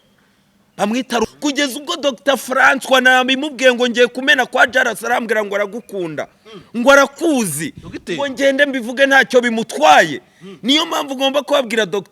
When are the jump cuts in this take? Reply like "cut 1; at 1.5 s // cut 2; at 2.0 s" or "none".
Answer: cut 1; at 1.3 s